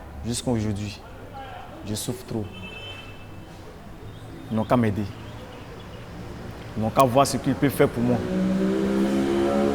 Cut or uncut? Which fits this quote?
uncut